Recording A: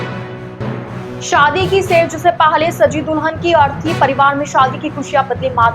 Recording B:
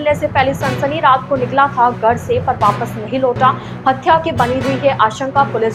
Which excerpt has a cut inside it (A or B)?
A